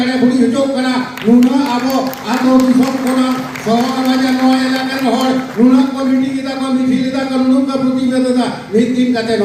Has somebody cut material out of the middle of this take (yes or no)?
no